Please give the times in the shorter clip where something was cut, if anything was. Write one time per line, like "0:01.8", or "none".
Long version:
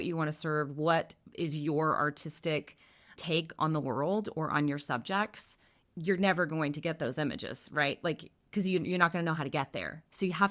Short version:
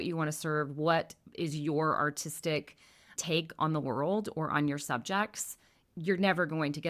none